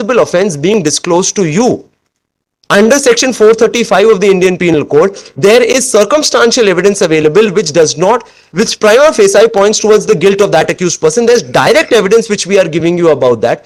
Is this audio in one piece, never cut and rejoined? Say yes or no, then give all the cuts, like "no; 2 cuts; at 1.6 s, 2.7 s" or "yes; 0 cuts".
yes; 0 cuts